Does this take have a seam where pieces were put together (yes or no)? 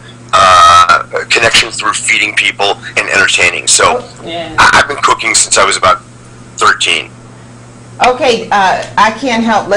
yes